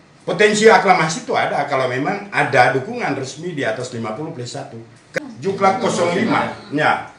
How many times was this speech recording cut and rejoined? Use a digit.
1